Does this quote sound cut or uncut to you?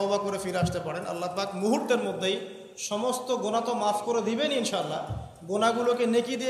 uncut